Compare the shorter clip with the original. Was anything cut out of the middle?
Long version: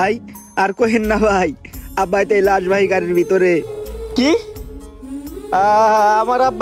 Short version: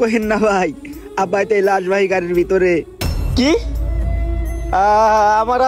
no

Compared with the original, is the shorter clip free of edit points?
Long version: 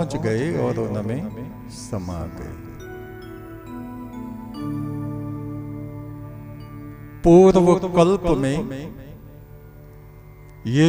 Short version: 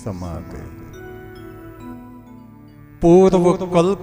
no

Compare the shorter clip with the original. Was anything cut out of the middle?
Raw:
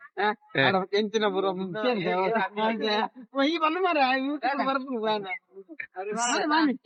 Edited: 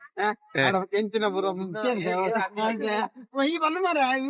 no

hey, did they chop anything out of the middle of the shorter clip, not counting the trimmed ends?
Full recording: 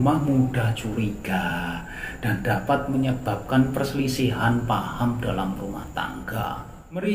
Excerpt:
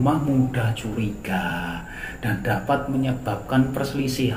no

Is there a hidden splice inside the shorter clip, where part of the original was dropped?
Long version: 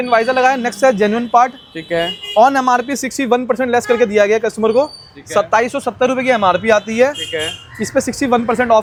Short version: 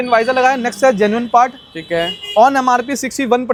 no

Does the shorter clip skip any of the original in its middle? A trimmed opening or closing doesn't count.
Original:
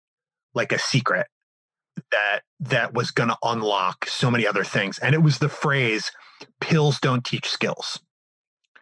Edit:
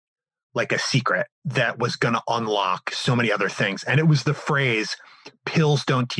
yes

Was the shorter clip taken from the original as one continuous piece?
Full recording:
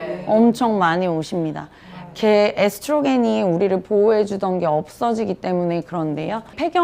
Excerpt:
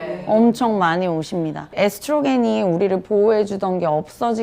no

